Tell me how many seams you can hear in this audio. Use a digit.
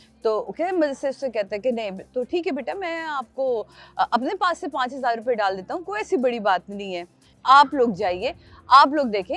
1